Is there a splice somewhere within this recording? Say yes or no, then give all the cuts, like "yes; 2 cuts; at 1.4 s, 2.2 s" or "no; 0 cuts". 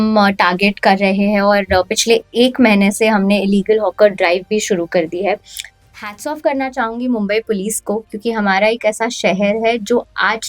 yes; 1 cut; at 5.6 s